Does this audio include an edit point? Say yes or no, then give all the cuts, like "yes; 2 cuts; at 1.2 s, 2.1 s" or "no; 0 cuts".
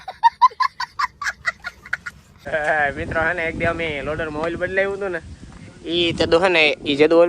yes; 1 cut; at 2.2 s